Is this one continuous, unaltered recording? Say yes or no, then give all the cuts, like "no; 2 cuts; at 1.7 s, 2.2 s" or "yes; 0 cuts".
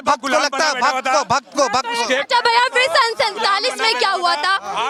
yes; 0 cuts